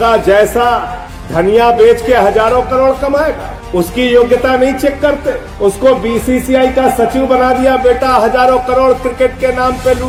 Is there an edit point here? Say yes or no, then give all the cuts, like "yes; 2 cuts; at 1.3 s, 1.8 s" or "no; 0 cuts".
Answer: no; 0 cuts